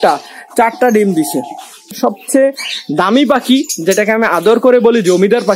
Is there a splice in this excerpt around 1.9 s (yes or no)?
yes